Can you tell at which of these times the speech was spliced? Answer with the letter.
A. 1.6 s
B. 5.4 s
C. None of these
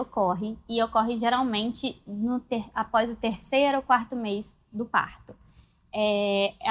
C